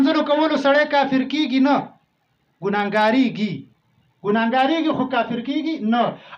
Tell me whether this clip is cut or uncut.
uncut